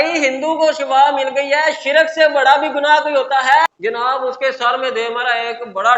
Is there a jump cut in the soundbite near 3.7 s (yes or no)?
yes